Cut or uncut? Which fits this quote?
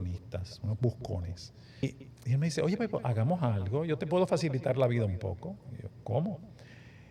cut